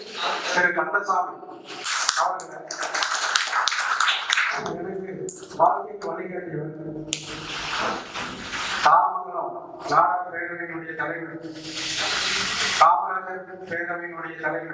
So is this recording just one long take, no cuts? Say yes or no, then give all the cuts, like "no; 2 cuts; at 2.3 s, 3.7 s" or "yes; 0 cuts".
yes; 0 cuts